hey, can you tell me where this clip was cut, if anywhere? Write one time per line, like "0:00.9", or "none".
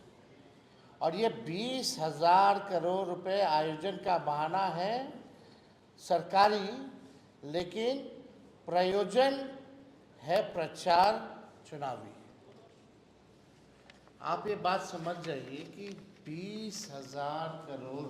none

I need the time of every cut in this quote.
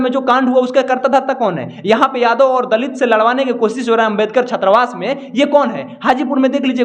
none

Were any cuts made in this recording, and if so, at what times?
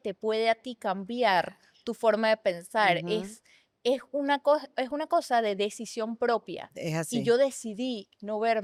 none

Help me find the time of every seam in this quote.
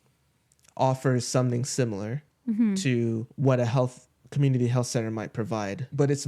0:03.3

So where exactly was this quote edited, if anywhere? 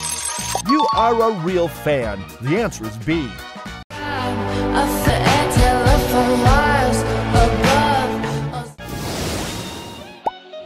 0:05.1

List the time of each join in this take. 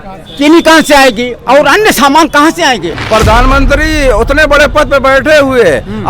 0:02.9

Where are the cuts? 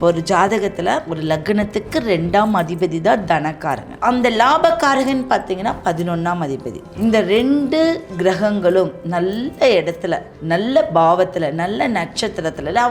0:01.1
0:03.9
0:06.8
0:10.3

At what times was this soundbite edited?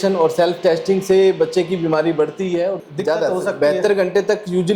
0:02.8

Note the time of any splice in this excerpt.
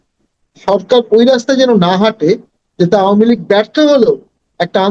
none

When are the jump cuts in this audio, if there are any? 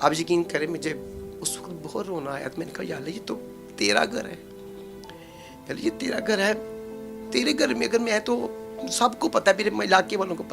none

